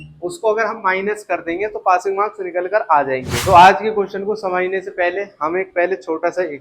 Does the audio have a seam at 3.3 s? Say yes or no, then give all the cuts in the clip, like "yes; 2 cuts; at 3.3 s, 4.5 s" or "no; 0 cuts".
yes; 1 cut; at 3.3 s